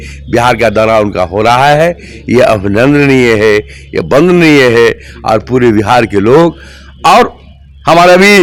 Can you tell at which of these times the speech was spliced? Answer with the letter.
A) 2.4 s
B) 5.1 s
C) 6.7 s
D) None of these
D